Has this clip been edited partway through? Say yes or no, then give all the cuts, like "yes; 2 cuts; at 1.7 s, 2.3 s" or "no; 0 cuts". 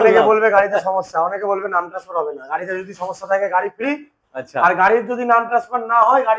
no; 0 cuts